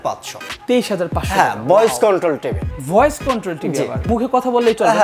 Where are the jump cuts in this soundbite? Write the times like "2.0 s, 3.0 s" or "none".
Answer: 4.1 s